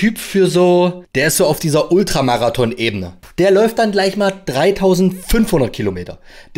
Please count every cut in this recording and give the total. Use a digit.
2